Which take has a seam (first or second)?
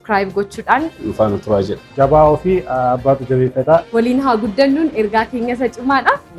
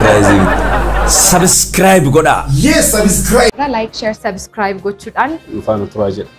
second